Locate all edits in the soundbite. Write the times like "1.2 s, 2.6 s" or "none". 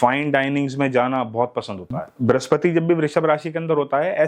2.0 s